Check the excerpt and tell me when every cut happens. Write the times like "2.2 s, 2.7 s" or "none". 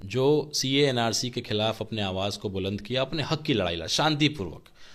none